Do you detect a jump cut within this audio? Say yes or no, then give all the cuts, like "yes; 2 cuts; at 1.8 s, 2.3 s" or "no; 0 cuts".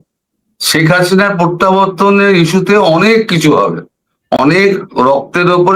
yes; 1 cut; at 4.4 s